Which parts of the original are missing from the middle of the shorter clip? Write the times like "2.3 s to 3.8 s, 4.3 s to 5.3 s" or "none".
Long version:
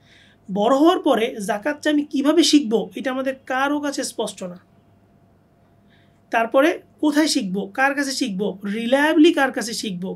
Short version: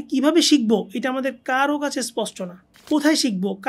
4.8 s to 6.9 s